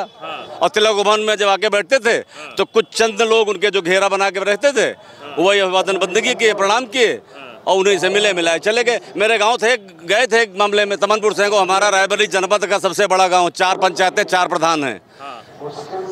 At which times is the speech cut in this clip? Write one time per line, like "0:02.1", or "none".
none